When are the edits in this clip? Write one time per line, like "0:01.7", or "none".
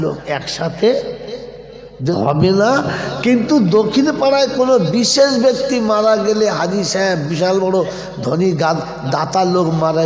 0:02.1